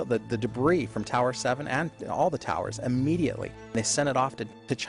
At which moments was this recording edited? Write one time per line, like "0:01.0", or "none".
0:03.7